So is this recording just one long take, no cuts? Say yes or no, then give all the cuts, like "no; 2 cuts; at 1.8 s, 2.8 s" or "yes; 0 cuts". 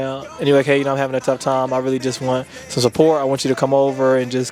yes; 0 cuts